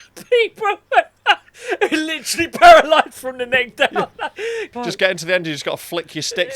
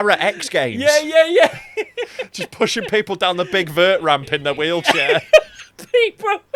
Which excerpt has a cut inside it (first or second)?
first